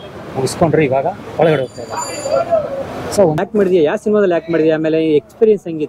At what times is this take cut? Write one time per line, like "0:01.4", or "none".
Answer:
0:03.4